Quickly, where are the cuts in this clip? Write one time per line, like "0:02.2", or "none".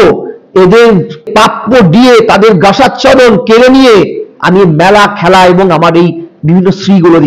0:01.3